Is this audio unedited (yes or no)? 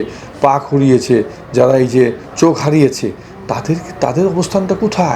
yes